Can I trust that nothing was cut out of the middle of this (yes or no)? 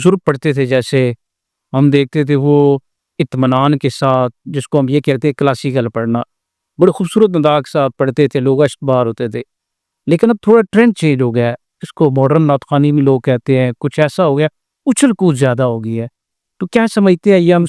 yes